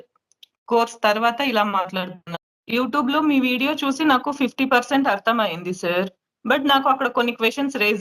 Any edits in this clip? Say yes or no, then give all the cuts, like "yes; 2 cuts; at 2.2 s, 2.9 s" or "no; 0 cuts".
yes; 1 cut; at 2.2 s